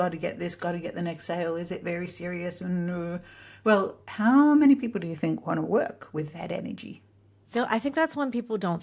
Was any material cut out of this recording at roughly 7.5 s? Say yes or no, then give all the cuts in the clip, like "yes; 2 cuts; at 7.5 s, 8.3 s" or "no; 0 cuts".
yes; 1 cut; at 7.5 s